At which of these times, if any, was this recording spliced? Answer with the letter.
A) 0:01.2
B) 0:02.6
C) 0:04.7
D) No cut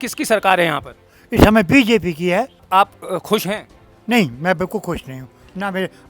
B